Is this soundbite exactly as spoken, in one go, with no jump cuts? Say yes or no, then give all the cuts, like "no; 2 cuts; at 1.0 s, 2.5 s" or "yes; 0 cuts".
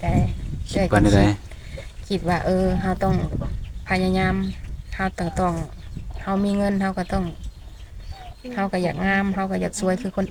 yes; 0 cuts